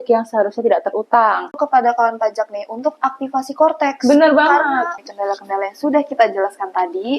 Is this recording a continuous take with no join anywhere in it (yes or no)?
no